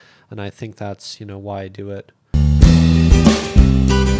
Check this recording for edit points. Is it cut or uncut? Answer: cut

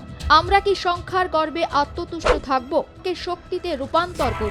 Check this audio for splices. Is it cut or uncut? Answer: cut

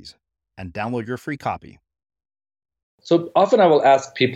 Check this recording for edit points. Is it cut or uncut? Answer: cut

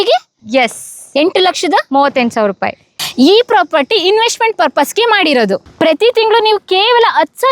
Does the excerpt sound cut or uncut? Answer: cut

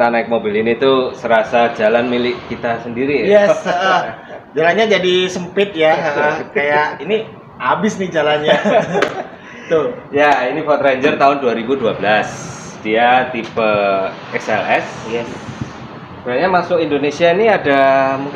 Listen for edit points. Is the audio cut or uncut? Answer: uncut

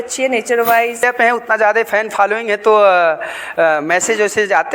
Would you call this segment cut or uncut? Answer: cut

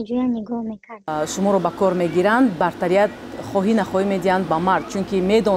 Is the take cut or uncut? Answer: cut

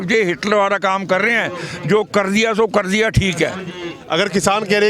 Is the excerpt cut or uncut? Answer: uncut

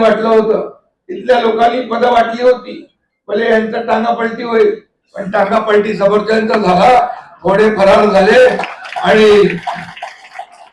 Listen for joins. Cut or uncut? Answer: uncut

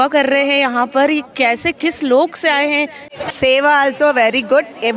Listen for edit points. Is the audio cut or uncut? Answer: cut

